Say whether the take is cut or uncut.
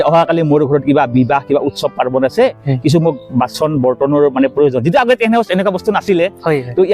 uncut